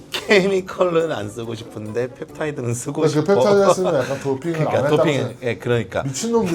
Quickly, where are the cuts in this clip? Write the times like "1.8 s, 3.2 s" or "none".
none